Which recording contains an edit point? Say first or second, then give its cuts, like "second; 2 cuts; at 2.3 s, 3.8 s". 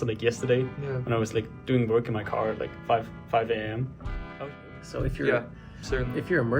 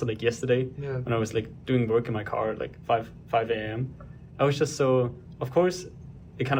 first; 1 cut; at 4.4 s